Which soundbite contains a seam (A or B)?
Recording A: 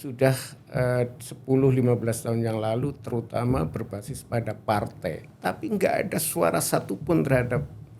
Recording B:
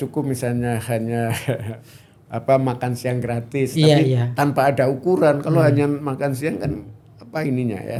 A